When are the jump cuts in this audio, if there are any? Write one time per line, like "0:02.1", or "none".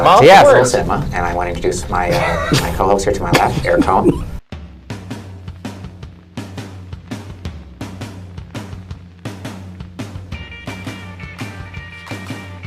none